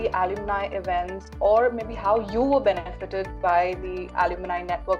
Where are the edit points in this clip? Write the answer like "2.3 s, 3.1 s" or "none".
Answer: none